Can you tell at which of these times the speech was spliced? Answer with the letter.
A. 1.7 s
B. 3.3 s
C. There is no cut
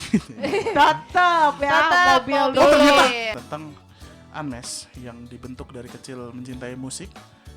B